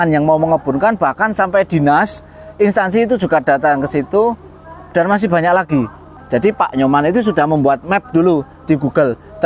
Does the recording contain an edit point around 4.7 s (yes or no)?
no